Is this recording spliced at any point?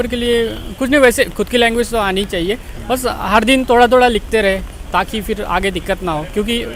no; 0 cuts

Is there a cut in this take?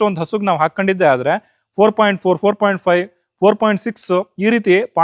no; 0 cuts

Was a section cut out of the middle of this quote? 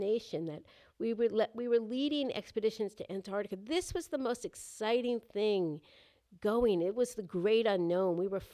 no; 0 cuts

